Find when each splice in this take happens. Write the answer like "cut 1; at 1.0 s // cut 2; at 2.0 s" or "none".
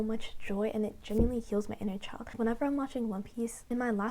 none